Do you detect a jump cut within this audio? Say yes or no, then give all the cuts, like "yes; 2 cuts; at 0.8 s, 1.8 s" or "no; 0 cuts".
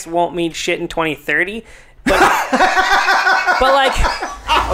no; 0 cuts